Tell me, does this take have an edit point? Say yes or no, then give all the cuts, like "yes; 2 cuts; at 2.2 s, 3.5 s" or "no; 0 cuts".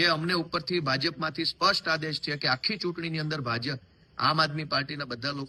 no; 0 cuts